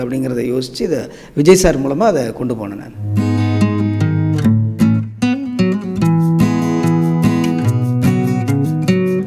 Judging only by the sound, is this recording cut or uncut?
uncut